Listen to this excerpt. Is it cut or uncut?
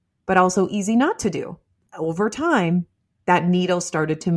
cut